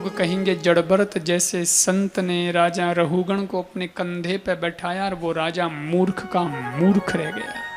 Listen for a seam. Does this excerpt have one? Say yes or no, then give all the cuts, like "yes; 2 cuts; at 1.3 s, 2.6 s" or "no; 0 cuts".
no; 0 cuts